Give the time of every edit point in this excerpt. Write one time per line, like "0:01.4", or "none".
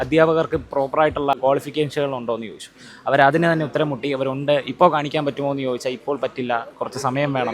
0:01.4